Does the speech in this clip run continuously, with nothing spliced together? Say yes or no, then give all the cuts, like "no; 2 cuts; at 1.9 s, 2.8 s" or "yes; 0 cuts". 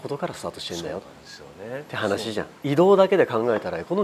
no; 1 cut; at 2.5 s